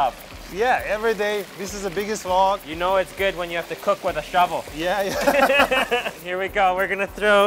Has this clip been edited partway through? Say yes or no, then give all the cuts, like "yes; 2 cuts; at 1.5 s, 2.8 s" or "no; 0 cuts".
yes; 2 cuts; at 2.7 s, 6.2 s